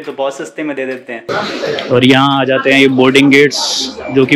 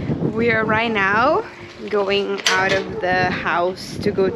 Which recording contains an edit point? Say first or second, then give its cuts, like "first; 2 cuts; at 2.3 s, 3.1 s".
first; 1 cut; at 1.1 s